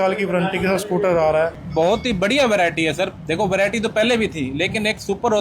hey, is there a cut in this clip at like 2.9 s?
no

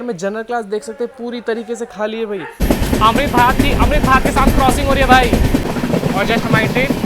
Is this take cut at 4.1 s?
no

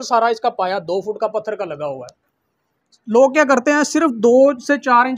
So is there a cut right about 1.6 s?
no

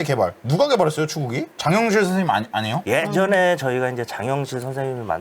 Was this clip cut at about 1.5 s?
yes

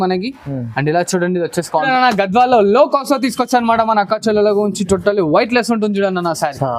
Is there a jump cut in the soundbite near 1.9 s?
yes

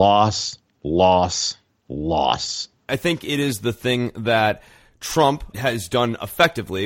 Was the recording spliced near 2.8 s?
yes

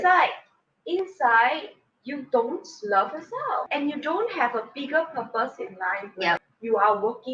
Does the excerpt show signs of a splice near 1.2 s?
no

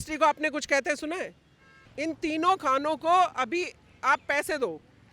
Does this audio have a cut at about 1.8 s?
yes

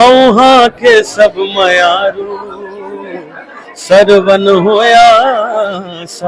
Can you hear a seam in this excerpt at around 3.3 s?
no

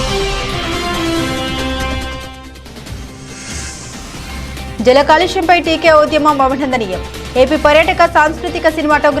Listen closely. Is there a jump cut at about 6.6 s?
no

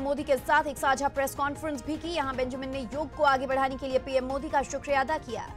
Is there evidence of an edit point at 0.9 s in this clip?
no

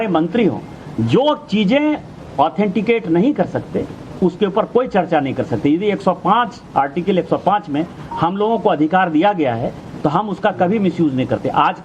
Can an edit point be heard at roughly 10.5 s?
yes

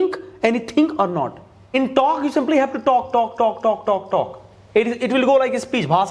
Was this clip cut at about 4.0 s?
no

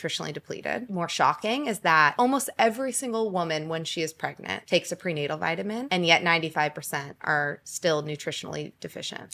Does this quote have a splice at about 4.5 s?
yes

